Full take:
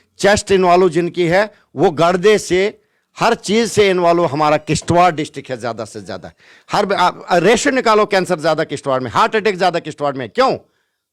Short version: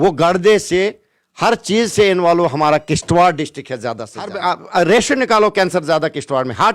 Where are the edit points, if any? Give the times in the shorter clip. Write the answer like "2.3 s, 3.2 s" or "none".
4.3 s